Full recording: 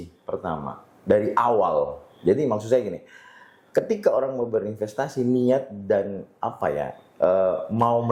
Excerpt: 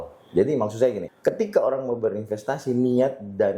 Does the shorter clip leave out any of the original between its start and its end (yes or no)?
yes